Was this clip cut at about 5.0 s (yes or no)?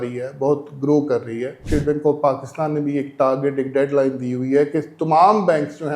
no